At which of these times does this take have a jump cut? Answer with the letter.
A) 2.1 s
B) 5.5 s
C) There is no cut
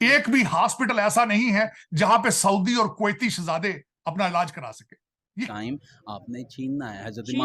B